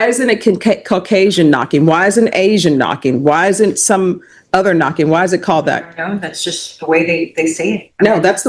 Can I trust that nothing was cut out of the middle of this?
yes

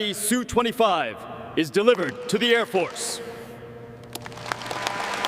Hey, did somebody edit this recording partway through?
no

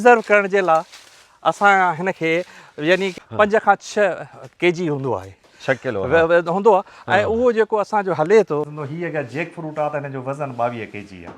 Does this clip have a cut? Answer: yes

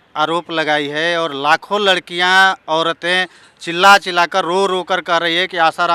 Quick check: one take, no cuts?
yes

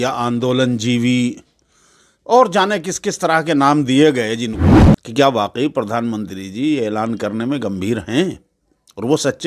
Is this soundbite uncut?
no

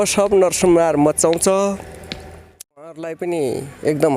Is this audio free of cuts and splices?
no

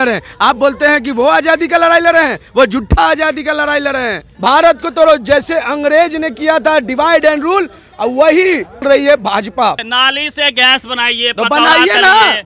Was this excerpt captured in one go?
no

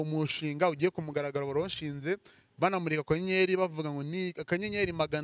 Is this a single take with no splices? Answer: yes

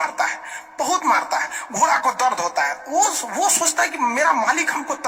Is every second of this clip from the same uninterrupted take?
yes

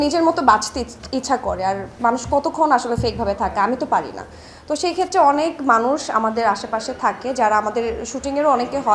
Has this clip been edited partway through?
no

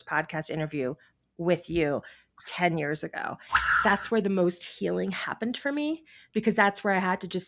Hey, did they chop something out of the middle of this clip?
yes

